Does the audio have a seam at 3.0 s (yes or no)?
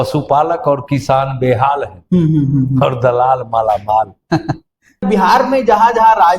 no